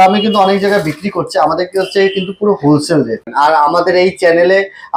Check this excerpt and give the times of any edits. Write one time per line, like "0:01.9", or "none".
0:03.3